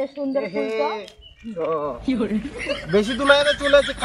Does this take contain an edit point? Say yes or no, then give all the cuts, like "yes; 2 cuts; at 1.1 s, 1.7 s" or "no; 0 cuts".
no; 0 cuts